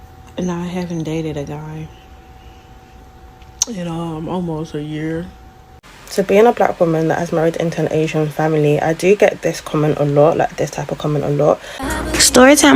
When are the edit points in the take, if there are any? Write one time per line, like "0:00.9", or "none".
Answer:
0:05.9
0:11.8